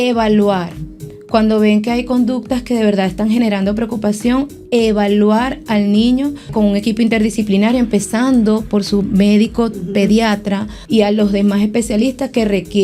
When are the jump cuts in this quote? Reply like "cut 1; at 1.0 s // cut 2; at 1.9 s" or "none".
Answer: cut 1; at 6.5 s // cut 2; at 10.7 s